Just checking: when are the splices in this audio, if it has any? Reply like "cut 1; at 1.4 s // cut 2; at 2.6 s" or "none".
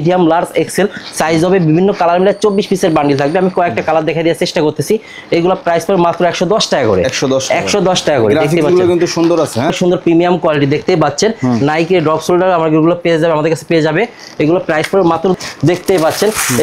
cut 1; at 9.7 s // cut 2; at 15.4 s